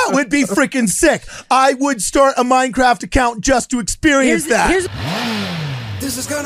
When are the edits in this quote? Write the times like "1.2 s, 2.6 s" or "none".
4.9 s